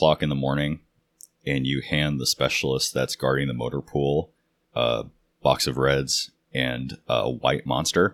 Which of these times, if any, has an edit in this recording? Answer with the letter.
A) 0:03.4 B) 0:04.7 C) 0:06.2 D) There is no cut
D